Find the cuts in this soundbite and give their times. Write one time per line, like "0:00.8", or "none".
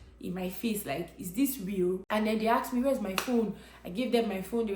0:02.0